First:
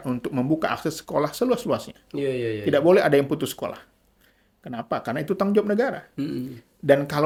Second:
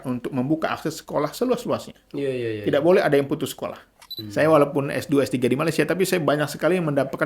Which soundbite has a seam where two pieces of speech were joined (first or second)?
second